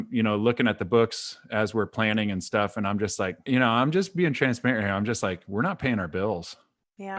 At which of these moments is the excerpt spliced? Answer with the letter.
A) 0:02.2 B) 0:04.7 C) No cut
C